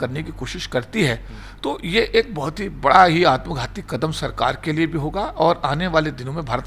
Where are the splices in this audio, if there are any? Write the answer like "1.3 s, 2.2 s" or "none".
none